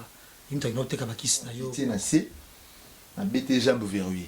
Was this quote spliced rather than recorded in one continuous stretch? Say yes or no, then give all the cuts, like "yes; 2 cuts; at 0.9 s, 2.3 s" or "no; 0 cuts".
yes; 1 cut; at 1.6 s